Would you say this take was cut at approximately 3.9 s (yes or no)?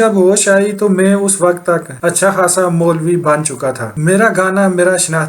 yes